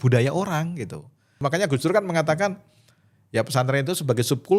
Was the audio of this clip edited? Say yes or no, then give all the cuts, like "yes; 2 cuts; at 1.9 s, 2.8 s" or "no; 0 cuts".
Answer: yes; 1 cut; at 1.4 s